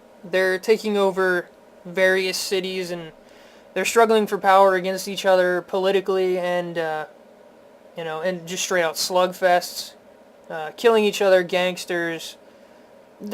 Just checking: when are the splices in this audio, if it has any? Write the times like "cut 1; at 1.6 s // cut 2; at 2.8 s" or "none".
cut 1; at 1.4 s